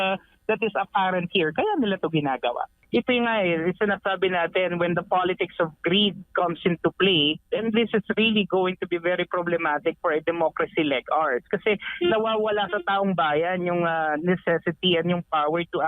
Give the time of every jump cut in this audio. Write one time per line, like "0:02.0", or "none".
0:02.8